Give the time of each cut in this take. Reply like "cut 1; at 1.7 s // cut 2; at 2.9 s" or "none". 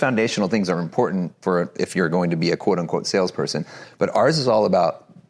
none